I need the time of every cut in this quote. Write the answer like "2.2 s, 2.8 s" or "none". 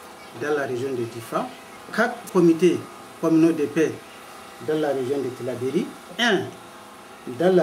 2.2 s, 6.0 s

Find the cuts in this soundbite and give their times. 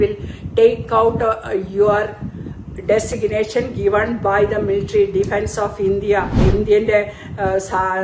6.4 s

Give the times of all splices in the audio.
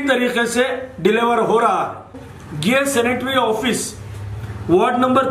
2.2 s

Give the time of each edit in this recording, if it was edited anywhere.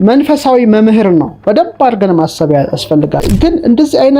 3.2 s

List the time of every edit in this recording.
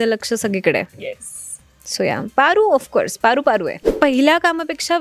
3.8 s

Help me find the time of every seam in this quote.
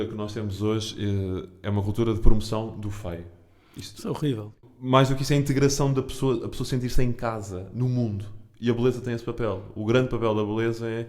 4.6 s

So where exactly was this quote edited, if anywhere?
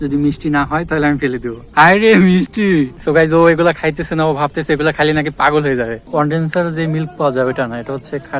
1.6 s, 3.0 s, 6.0 s

